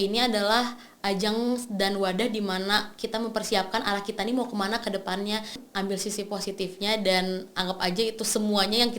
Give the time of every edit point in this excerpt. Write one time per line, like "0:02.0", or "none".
0:05.6